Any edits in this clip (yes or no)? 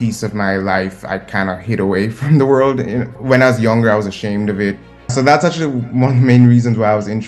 yes